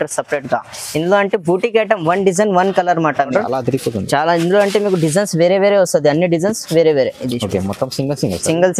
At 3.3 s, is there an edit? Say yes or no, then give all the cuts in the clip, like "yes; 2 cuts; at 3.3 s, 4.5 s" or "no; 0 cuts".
yes; 1 cut; at 3.3 s